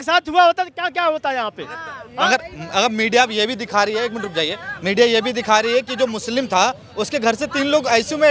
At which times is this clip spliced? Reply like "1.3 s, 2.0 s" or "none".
none